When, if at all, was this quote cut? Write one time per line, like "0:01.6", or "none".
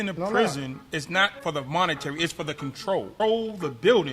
0:01.3
0:03.1